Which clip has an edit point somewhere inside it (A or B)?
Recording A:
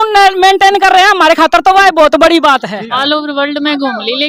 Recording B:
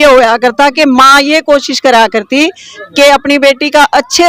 A